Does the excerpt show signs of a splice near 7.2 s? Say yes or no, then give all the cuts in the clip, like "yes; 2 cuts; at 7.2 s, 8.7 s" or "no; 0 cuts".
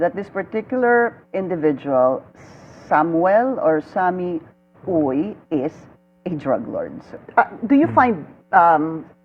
yes; 1 cut; at 7.2 s